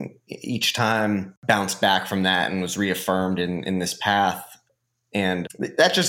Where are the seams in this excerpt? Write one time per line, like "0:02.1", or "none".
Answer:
0:01.3